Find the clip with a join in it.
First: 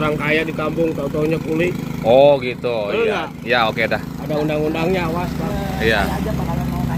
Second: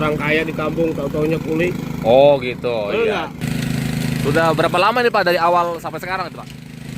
second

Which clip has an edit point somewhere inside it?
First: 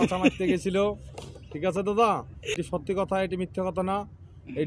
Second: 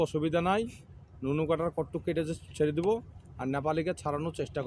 first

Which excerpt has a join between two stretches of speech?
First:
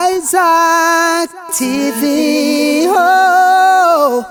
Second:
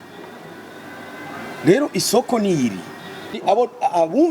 second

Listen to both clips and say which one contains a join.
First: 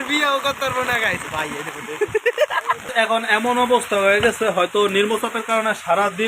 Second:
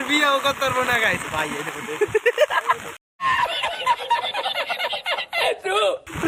first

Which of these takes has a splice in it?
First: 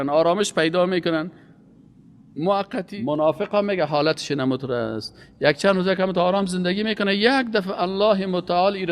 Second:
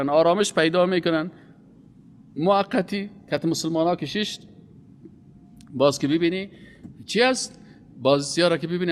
first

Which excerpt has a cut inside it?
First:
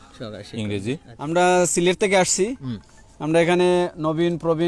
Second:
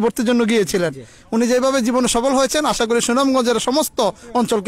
first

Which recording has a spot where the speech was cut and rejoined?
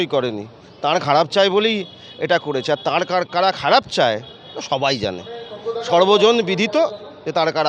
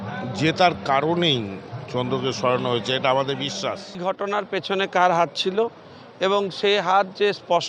second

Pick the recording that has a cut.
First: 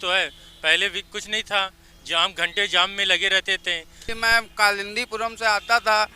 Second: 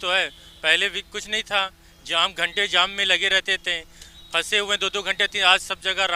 first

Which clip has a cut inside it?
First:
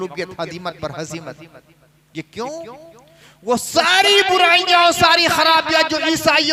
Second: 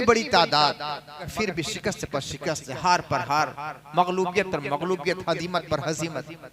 second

